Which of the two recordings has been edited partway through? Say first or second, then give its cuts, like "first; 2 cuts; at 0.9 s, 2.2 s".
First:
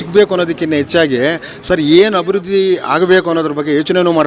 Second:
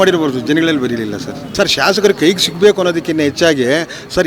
second; 1 cut; at 1.5 s